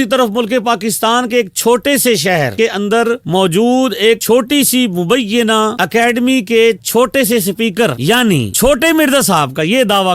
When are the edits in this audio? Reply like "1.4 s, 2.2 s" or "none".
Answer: 2.5 s